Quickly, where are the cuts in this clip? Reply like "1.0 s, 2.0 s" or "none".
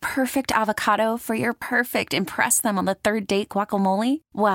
none